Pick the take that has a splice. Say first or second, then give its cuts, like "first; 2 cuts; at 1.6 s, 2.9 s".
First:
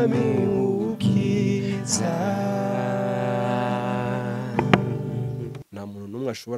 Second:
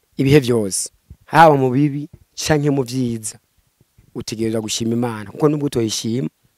first; 1 cut; at 5.6 s